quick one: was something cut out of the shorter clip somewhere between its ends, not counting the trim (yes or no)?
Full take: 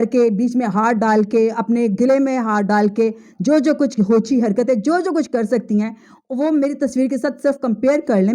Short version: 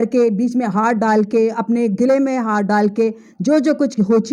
no